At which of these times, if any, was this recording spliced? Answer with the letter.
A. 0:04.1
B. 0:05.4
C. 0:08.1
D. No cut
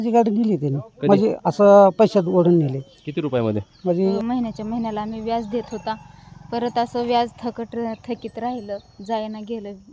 A